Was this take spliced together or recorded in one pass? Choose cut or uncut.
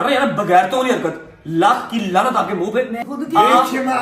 cut